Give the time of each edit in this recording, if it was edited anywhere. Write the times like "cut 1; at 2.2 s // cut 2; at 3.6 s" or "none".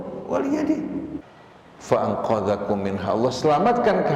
cut 1; at 1.2 s